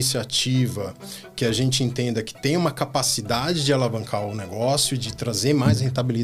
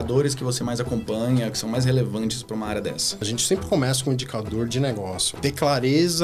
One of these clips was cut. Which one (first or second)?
second